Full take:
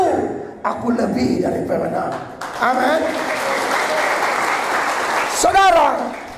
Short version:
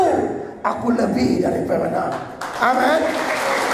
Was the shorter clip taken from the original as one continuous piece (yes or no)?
yes